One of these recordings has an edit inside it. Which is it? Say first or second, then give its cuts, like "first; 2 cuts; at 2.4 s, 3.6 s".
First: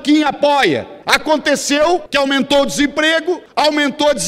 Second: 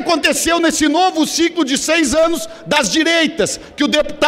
first; 3 cuts; at 0.9 s, 2.1 s, 3.4 s